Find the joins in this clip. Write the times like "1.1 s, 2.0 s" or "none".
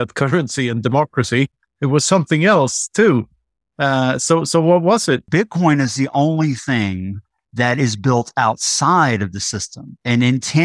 5.3 s